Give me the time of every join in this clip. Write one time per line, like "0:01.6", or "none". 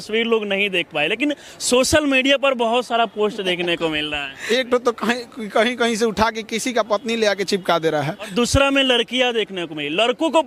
0:04.4
0:08.3